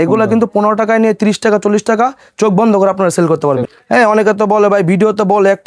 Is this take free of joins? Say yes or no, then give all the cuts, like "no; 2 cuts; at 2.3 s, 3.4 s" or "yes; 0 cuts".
no; 1 cut; at 3.7 s